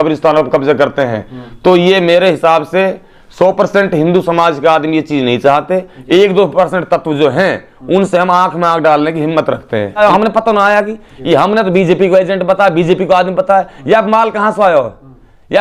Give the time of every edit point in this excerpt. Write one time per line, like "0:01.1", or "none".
0:10.0